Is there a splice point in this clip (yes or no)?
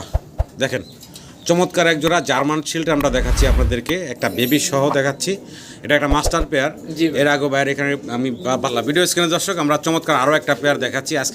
yes